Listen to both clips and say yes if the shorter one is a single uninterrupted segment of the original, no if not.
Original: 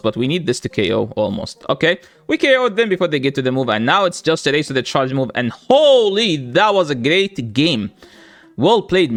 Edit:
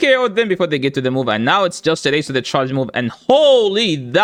yes